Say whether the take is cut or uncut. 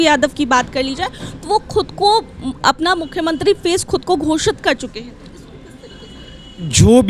uncut